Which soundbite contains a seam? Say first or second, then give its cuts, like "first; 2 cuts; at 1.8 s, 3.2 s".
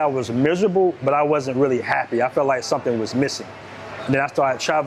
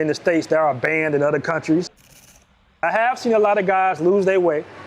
second; 1 cut; at 2.5 s